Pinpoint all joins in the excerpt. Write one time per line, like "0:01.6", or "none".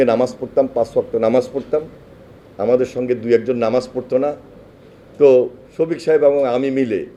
none